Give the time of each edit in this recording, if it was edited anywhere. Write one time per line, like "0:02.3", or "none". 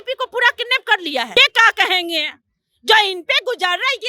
0:01.5

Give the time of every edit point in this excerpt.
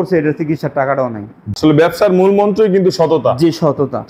0:01.5

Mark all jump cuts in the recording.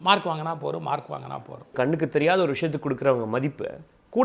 0:01.7

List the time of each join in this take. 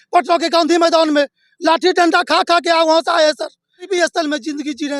0:03.9

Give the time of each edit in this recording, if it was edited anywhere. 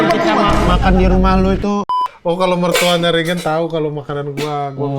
0:01.9

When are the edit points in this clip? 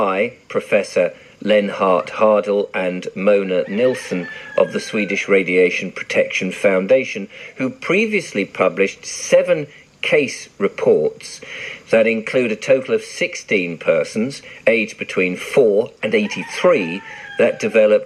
none

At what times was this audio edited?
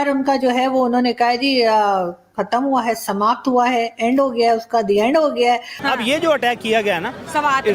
0:05.8

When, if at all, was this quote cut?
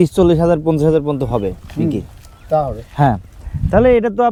none

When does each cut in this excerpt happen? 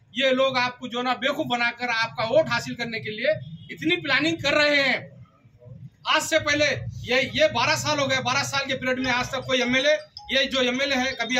none

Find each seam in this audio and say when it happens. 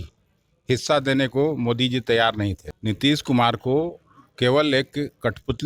0:02.6

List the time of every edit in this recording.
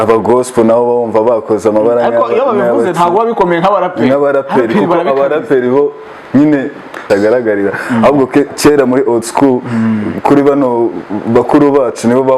0:07.0

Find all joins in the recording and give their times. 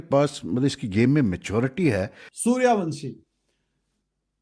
0:02.2

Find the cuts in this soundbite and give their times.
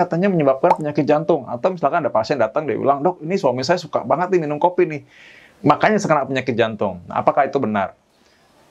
none

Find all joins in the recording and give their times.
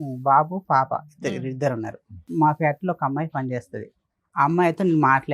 0:02.3

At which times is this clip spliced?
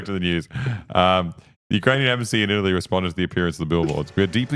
none

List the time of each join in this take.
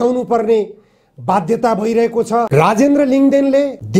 0:02.5

